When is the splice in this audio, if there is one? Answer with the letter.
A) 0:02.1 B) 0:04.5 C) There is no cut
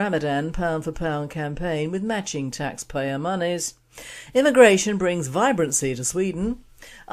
B